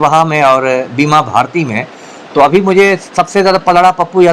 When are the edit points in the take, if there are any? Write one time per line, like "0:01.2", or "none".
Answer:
none